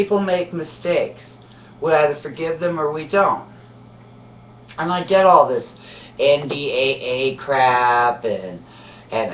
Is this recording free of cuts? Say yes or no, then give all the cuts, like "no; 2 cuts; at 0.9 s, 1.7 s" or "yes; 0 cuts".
no; 1 cut; at 3.6 s